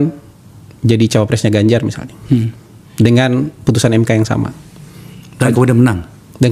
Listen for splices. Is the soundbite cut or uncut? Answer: uncut